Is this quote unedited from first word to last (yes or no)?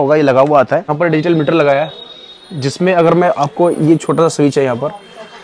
no